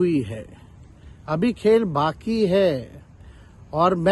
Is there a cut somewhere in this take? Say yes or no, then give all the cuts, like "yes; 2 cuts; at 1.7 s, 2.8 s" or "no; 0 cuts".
no; 0 cuts